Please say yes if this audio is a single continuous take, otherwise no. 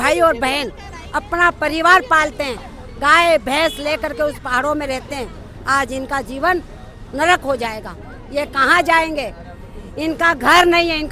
yes